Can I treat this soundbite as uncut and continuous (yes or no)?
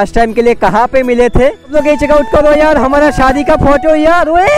no